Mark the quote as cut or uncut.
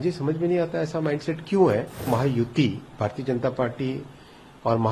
cut